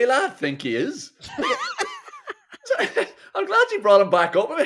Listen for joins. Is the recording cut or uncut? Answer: uncut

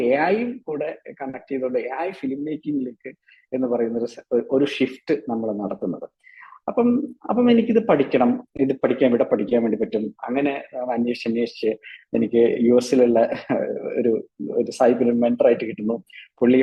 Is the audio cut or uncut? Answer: uncut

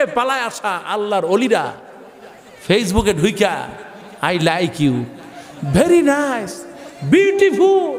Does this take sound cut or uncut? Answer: uncut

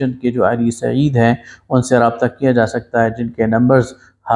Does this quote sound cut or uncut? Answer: uncut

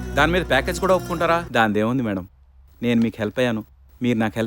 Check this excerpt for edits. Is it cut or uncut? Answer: cut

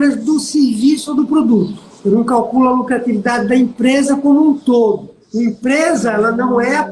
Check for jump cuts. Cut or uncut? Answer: uncut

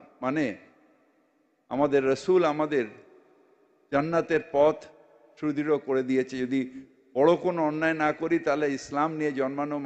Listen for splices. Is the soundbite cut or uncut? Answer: uncut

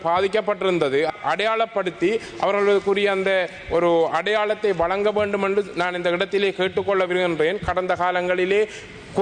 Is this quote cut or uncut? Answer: uncut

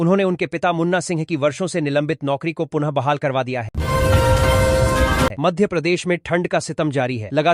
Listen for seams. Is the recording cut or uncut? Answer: cut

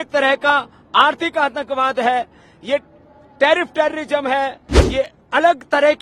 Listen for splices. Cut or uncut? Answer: uncut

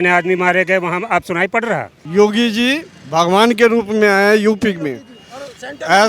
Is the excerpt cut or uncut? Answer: cut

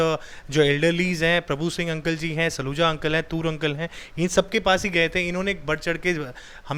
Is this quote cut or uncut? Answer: uncut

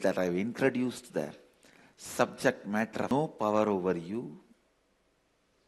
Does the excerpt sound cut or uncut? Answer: cut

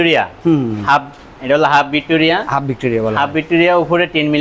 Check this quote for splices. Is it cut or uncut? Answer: uncut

